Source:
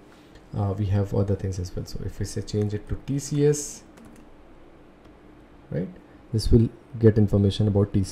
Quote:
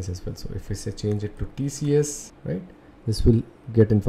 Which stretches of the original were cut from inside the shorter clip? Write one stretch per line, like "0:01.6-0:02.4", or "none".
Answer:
0:03.8-0:05.5